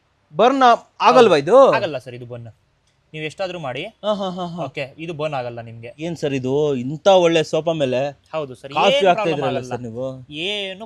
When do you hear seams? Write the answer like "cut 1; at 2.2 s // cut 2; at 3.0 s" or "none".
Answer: cut 1; at 5.8 s